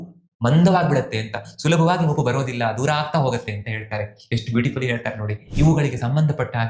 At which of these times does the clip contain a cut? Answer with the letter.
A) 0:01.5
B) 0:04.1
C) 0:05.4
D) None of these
C